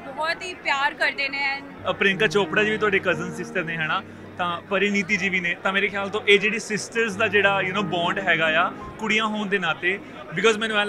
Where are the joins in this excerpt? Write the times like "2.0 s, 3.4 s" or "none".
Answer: 1.7 s

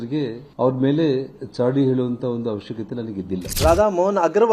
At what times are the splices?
none

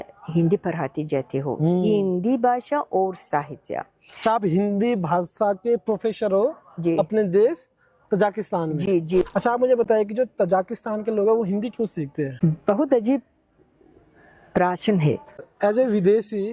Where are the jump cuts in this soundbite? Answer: 9.3 s, 12.3 s, 15.4 s

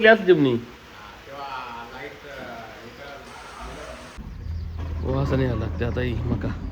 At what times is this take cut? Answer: 4.2 s

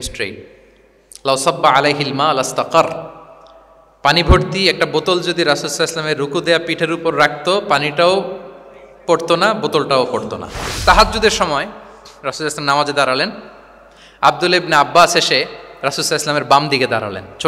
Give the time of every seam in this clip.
10.6 s

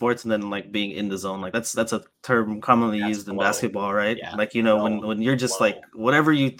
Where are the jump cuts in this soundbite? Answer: none

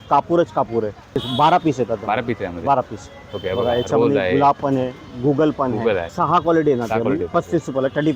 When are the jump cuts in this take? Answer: 1.2 s, 6.1 s

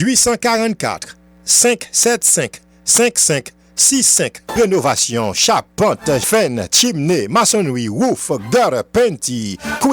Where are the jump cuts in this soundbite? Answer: 2.9 s, 4.4 s

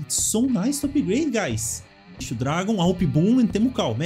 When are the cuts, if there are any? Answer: 2.2 s

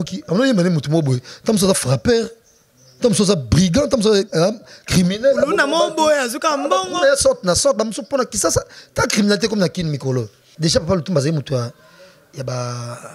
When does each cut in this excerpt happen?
10.4 s

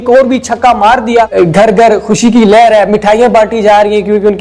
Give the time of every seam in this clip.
1.3 s

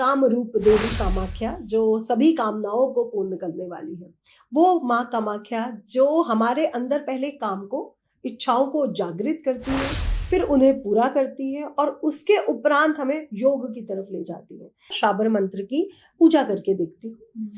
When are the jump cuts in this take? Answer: 15.0 s

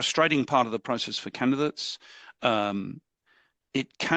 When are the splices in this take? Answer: none

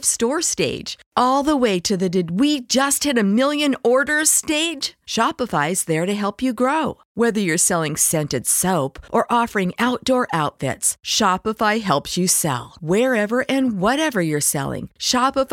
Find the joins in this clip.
none

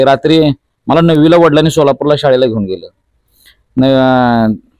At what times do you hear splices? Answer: none

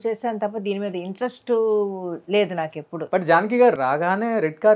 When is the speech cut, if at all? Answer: 2.9 s

